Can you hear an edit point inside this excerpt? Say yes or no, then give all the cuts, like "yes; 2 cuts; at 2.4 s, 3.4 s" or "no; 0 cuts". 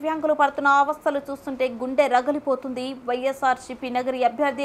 no; 0 cuts